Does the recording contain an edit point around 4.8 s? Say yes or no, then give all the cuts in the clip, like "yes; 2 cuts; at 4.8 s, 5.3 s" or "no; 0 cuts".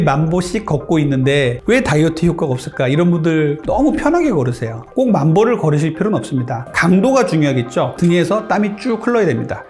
yes; 3 cuts; at 3.6 s, 4.8 s, 7.9 s